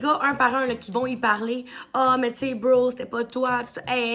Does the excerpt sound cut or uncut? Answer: uncut